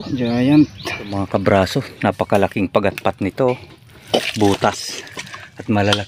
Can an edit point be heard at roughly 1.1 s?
yes; 1 cut; at 1.1 s

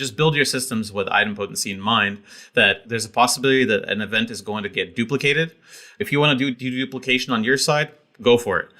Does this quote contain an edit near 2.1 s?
no; 0 cuts

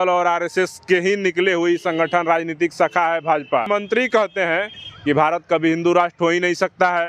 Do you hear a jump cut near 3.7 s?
yes; 1 cut; at 3.7 s

